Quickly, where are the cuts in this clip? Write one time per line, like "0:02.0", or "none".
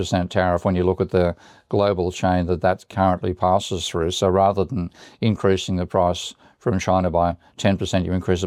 none